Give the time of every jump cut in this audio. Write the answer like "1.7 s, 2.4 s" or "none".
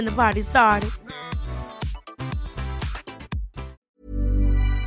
3.8 s